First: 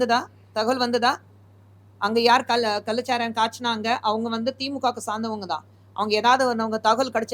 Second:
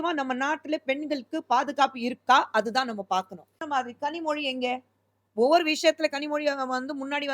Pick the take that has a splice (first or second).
second